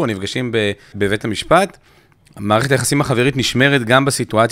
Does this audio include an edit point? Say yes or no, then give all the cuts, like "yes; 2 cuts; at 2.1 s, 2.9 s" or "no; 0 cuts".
yes; 1 cut; at 0.9 s